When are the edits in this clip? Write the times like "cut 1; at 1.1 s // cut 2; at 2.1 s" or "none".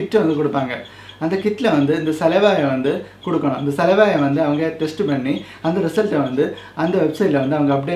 none